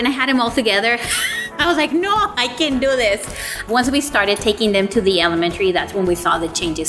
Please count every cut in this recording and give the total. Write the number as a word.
zero